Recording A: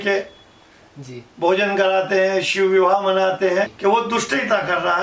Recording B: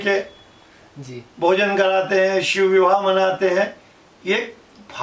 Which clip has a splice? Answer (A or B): A